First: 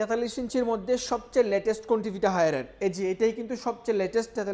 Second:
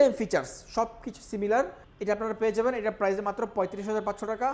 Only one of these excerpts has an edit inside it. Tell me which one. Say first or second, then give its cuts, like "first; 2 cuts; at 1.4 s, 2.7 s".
second; 1 cut; at 1.9 s